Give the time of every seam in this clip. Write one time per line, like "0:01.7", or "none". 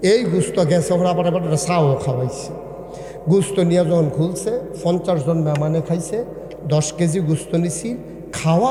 none